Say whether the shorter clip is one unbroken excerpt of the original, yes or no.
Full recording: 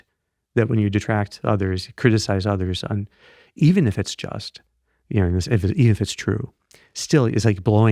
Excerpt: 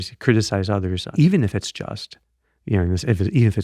no